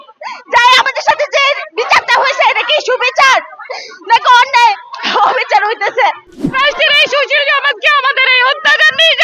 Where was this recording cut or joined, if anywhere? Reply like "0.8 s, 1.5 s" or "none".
6.3 s

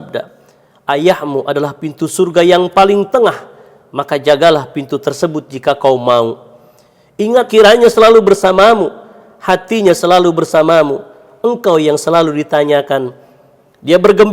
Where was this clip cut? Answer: 7.5 s

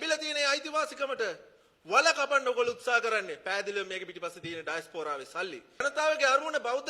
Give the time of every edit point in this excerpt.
5.8 s

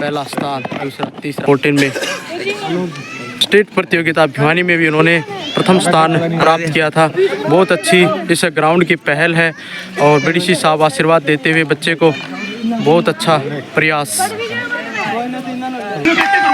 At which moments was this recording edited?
1.4 s

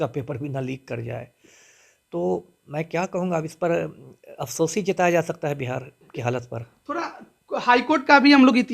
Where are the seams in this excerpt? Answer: none

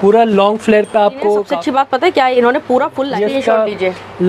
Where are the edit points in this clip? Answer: 1.5 s, 3.0 s

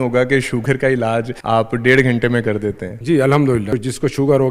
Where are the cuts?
1.3 s, 2.9 s, 3.7 s

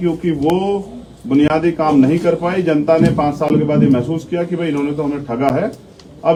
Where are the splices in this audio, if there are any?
none

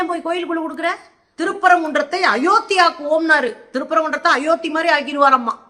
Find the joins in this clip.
1.2 s

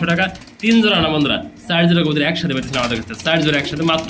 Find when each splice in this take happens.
none

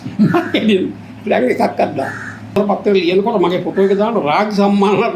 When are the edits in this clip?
2.5 s

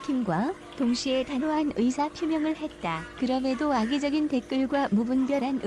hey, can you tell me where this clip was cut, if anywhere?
2.8 s

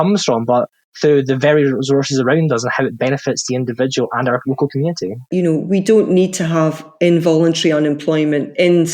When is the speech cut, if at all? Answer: 5.2 s

